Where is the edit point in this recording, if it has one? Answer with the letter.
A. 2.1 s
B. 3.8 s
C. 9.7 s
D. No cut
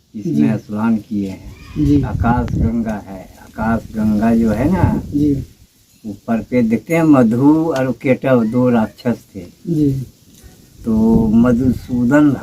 A